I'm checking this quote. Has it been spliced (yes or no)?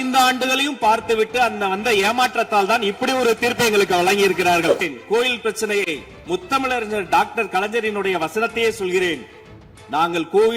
yes